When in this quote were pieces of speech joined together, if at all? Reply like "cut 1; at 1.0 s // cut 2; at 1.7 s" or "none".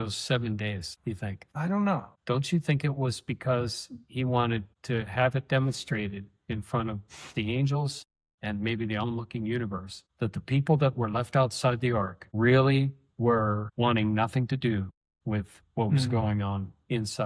none